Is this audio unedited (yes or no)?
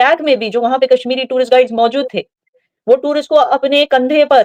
yes